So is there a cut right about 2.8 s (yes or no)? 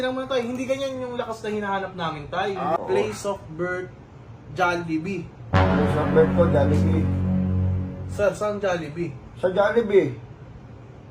yes